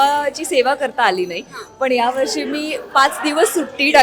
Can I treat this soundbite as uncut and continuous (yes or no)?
yes